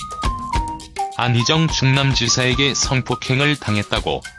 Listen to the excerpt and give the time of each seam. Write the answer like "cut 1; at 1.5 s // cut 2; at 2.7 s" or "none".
none

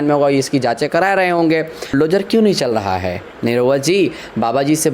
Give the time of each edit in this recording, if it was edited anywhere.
cut 1; at 1.9 s

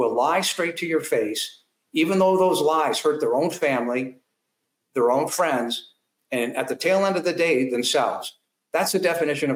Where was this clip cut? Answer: none

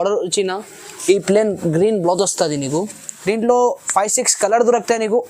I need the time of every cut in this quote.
cut 1; at 3.0 s

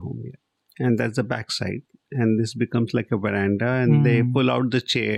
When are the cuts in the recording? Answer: none

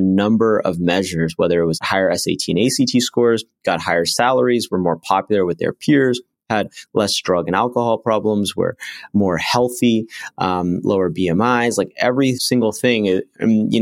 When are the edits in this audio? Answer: cut 1; at 1.8 s // cut 2; at 12.4 s

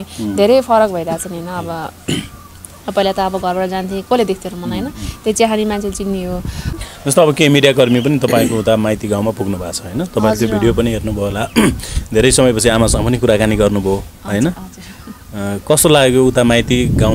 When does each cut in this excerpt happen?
cut 1; at 6.7 s

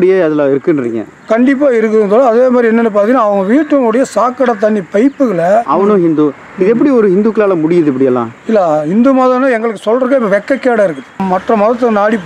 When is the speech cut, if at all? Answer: cut 1; at 5.7 s // cut 2; at 11.2 s

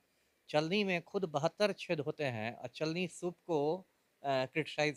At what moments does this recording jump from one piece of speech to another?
none

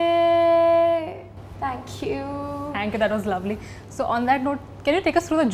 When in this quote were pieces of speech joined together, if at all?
none

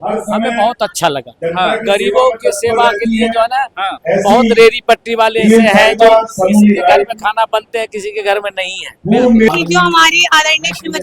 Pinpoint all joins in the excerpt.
cut 1; at 9.5 s

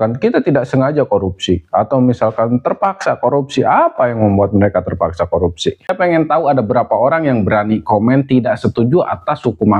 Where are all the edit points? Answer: cut 1; at 5.9 s

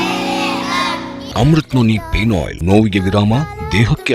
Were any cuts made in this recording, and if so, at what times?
cut 1; at 1.2 s // cut 2; at 2.5 s

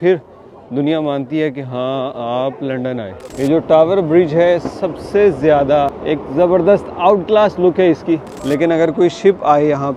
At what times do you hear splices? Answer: cut 1; at 3.2 s // cut 2; at 6.0 s // cut 3; at 8.3 s

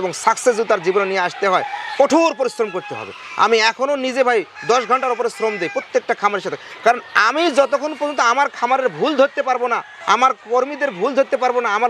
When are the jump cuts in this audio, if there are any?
none

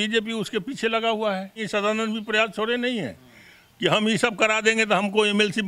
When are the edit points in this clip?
cut 1; at 1.6 s

